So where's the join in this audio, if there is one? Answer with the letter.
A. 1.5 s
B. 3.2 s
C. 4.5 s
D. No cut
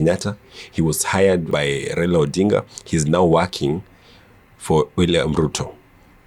A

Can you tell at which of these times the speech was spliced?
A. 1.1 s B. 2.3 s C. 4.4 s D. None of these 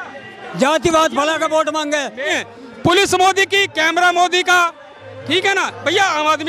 B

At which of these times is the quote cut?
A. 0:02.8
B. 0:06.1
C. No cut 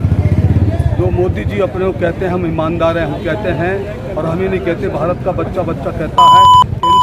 B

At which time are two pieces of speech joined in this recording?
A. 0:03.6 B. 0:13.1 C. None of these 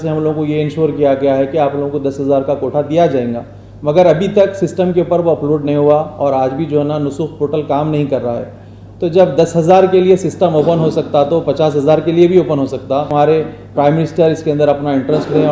B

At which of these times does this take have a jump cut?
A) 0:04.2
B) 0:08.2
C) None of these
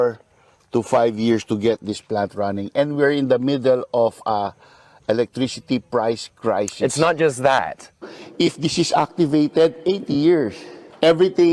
B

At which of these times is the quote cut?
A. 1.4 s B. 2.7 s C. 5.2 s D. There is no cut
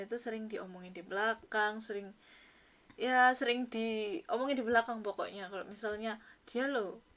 D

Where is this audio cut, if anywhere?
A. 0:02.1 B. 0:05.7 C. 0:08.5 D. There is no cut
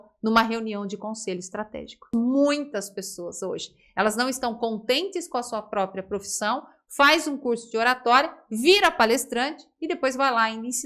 A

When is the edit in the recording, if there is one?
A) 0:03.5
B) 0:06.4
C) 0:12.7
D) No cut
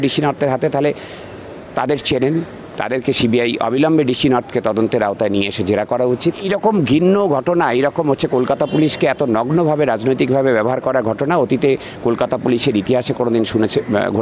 B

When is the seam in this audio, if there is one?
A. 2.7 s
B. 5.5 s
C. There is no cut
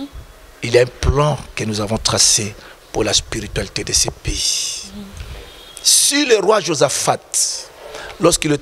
C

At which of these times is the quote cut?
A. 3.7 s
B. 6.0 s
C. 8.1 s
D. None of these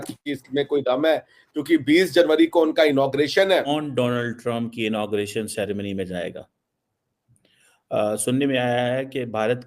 A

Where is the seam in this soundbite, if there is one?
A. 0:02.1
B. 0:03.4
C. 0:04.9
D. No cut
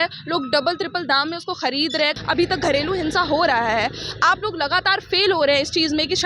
A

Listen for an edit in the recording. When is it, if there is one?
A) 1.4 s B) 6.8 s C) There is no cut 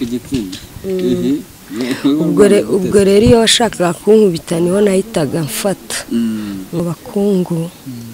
B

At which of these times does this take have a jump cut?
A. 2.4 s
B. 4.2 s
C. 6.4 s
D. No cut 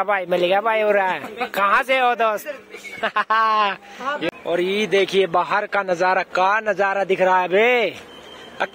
B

